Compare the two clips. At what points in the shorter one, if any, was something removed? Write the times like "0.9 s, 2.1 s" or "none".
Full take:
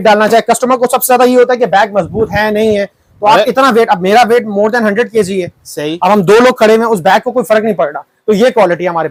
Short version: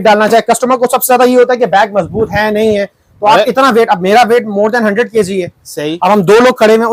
none